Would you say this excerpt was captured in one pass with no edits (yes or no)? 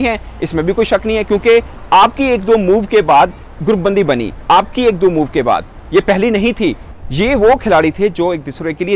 no